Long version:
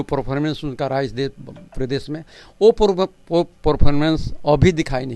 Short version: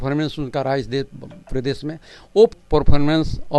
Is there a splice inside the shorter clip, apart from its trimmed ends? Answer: yes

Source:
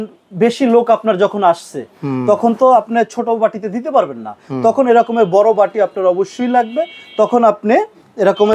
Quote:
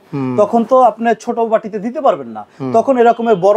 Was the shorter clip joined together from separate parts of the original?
no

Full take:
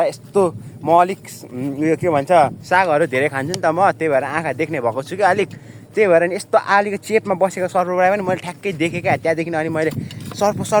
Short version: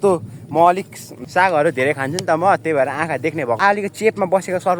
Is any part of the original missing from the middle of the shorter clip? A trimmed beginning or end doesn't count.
yes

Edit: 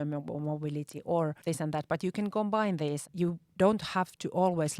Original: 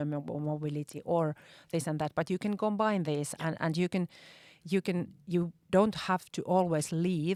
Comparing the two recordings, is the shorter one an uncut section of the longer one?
no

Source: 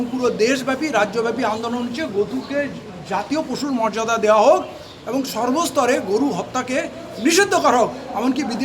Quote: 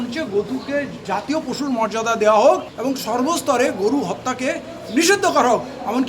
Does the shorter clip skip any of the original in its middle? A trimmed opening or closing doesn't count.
yes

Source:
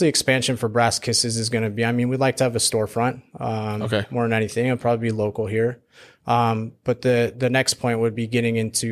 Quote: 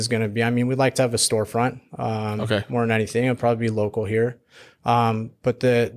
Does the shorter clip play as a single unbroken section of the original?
yes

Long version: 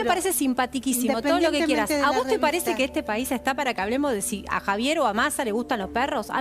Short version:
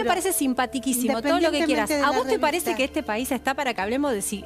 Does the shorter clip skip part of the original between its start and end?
no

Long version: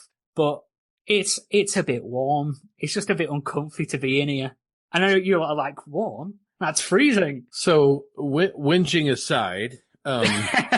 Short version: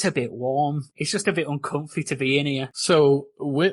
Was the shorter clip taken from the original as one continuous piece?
no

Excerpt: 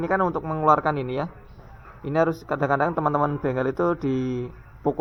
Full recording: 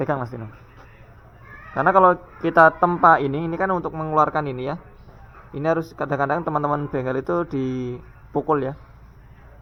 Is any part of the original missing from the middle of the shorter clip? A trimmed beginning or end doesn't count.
no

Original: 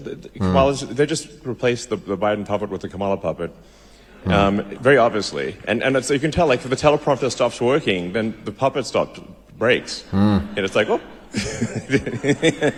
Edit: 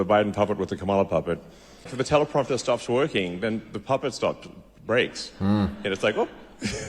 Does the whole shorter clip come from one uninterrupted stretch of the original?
no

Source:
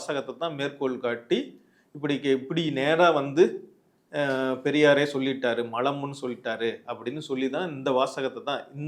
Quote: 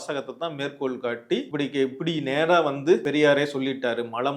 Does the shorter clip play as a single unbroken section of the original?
no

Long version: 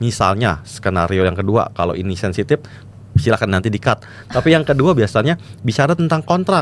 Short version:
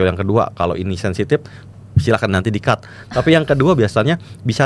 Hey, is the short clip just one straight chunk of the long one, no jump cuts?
yes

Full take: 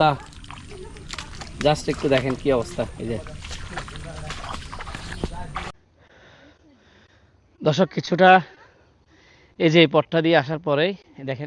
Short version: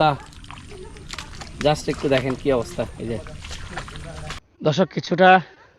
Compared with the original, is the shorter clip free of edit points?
no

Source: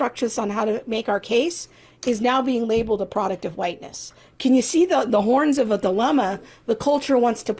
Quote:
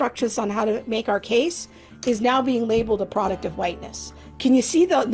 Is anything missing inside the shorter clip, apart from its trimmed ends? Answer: no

